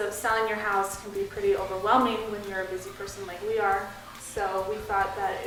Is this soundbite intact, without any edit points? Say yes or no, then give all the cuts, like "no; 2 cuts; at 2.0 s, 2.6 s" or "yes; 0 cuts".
yes; 0 cuts